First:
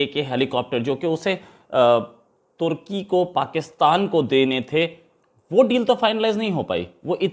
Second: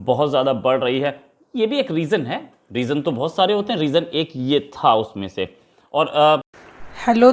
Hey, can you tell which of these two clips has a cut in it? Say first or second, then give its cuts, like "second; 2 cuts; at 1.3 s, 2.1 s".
second; 1 cut; at 6.4 s